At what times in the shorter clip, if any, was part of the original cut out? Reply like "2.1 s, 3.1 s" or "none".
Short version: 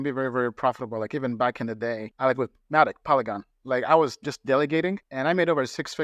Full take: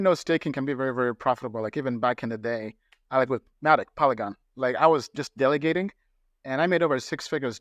2.1 s, 5.1 s